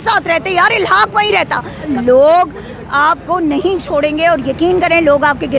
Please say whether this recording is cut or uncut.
cut